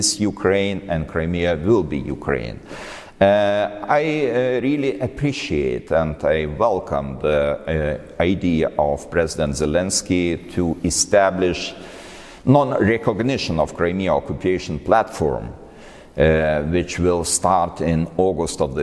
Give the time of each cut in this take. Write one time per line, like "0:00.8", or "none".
none